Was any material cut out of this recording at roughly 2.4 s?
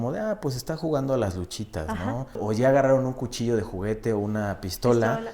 yes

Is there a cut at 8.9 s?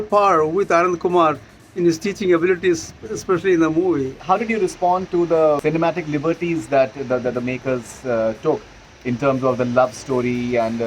no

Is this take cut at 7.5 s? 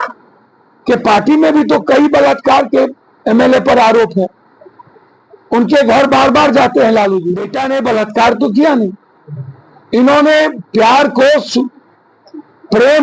yes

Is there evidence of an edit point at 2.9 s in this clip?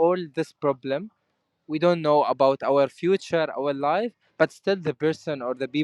no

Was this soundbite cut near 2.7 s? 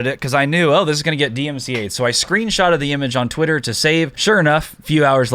no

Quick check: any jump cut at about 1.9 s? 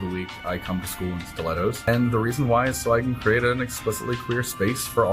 yes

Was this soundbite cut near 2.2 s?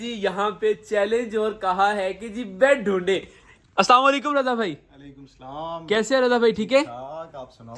no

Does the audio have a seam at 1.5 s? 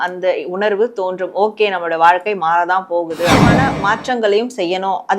no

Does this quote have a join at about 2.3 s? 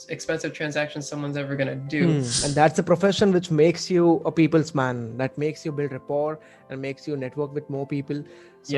yes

